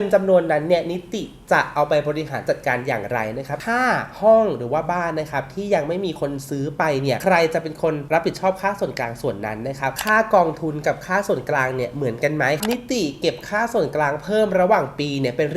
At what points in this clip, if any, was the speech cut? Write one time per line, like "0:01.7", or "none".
0:03.6
0:09.9
0:12.6